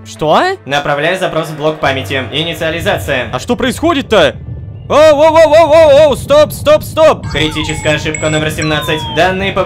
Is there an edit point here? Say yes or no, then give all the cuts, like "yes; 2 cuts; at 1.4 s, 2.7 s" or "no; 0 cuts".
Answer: no; 0 cuts